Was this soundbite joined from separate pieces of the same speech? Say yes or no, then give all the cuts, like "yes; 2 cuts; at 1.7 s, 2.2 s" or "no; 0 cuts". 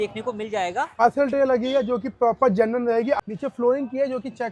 yes; 2 cuts; at 1.0 s, 3.2 s